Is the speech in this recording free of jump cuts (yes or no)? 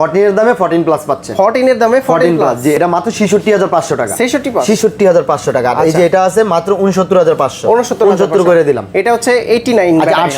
yes